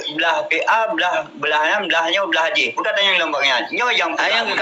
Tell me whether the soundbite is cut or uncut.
uncut